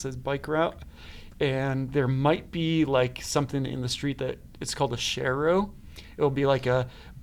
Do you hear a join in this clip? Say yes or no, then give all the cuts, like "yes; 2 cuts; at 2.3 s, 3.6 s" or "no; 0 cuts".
no; 0 cuts